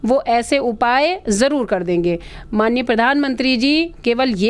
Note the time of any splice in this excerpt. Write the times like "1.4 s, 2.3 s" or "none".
none